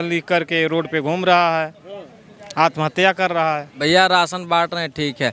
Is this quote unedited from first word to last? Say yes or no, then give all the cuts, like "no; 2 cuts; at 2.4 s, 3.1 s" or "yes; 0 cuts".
no; 1 cut; at 3.7 s